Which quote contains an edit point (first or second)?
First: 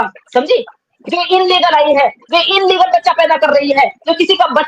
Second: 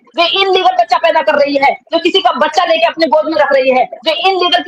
first